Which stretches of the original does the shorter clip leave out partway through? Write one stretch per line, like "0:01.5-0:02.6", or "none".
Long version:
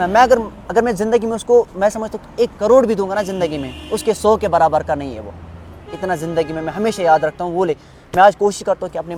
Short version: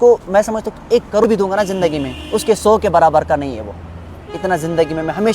0:02.7-0:02.8